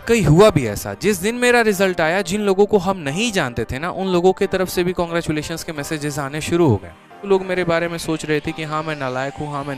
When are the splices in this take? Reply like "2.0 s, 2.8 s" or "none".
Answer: 7.3 s